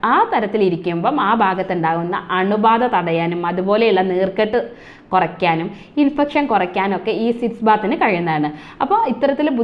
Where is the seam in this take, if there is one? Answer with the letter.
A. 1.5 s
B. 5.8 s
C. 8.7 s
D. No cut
D